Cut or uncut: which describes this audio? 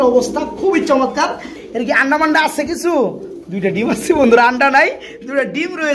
cut